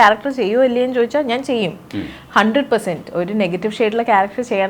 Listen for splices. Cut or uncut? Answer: uncut